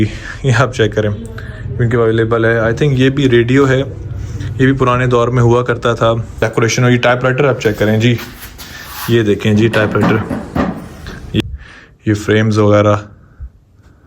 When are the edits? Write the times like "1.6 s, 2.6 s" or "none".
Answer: 6.4 s, 11.4 s